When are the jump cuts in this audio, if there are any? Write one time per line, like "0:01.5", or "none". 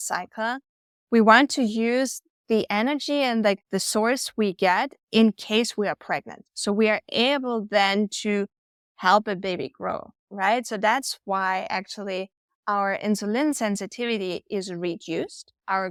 none